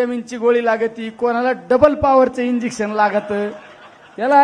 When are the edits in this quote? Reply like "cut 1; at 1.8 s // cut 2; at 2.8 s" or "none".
none